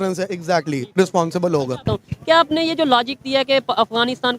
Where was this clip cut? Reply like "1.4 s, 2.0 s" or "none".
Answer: 1.9 s